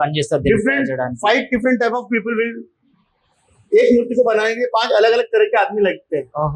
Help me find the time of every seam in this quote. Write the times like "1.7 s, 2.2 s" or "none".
none